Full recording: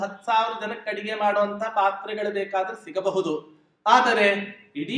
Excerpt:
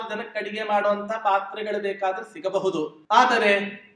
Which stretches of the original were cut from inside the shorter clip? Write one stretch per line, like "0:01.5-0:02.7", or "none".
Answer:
0:03.5-0:03.7